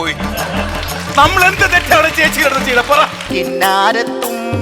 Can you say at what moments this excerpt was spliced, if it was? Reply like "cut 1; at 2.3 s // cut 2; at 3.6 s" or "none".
cut 1; at 3.3 s